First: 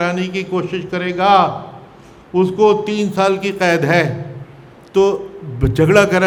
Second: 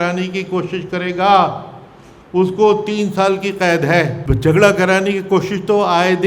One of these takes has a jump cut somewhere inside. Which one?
second; 1 cut; at 4.2 s

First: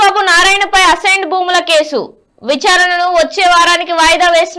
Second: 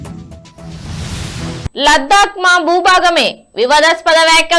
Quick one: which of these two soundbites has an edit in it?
second; 1 cut; at 1.7 s

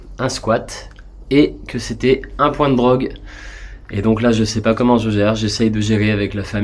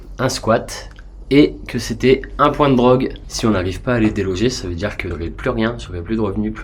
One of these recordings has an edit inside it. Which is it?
second; 2 cuts; at 3.2 s, 5.1 s

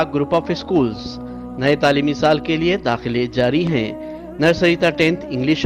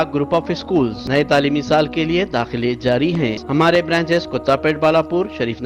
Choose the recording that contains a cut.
second; 2 cuts; at 1.0 s, 3.4 s

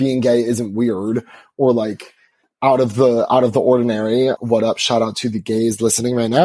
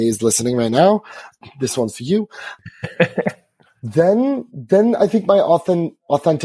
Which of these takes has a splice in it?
first; 1 cut; at 4.4 s

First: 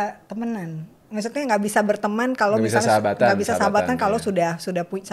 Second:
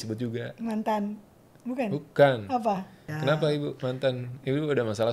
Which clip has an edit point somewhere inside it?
second; 1 cut; at 3.0 s

